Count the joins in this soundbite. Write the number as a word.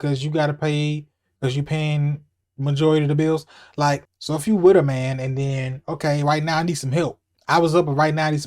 one